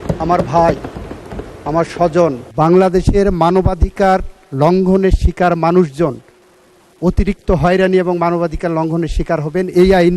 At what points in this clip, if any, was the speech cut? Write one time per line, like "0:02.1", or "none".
0:02.4